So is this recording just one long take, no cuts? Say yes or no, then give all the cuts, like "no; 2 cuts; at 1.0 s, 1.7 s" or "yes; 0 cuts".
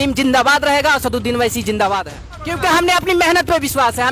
no; 1 cut; at 2.5 s